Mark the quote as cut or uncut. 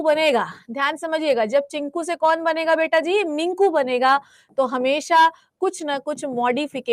uncut